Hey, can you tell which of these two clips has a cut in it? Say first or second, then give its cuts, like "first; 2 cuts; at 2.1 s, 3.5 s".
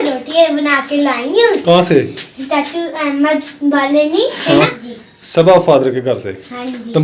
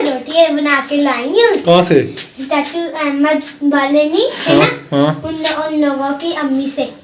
first; 1 cut; at 4.8 s